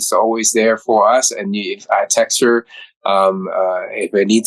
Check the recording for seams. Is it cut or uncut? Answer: uncut